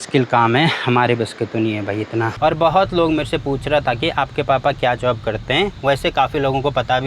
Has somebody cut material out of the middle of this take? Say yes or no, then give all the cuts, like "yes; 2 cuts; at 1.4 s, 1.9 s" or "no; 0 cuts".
no; 0 cuts